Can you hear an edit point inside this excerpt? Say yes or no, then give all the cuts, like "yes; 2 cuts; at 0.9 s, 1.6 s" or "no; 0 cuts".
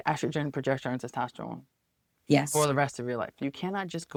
no; 0 cuts